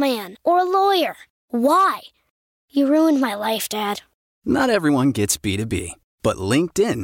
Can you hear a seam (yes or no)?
no